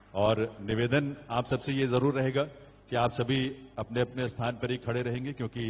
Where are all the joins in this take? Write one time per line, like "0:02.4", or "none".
none

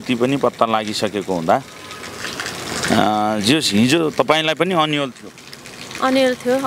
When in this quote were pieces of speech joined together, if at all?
none

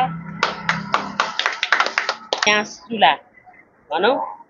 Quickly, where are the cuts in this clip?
0:02.5

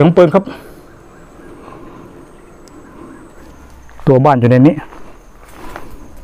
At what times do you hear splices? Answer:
0:03.5

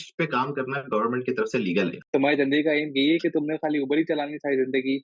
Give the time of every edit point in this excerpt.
0:02.0

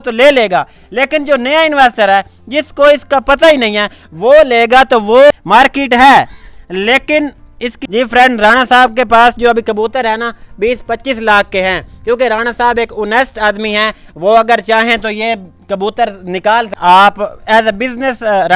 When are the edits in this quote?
0:05.3
0:07.8
0:16.8

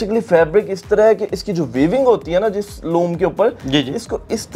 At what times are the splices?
none

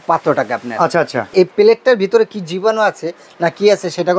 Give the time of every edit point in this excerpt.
0:01.3

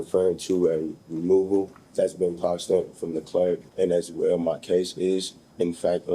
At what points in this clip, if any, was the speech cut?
0:01.8
0:03.7

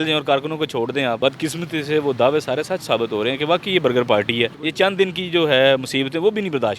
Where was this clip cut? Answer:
0:01.2
0:04.6

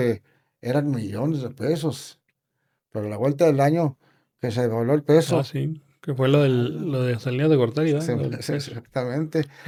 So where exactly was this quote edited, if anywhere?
none

